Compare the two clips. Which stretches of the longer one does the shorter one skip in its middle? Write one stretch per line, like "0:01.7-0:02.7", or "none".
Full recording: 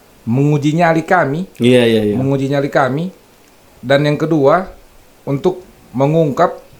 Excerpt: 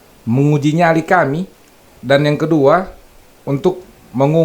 0:01.5-0:03.3